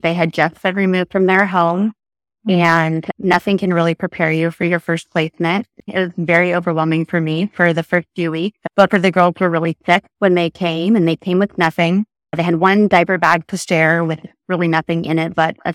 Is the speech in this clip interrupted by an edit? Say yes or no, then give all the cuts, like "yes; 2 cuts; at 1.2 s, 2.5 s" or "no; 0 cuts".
yes; 2 cuts; at 5.8 s, 12.2 s